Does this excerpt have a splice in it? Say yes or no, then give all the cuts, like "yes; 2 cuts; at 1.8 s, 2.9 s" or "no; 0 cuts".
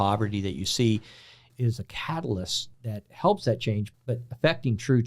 yes; 3 cuts; at 1.4 s, 2.7 s, 3.9 s